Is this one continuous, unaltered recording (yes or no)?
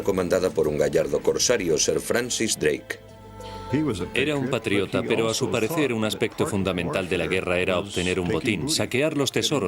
no